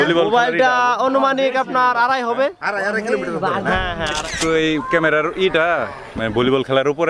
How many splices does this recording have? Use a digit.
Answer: 1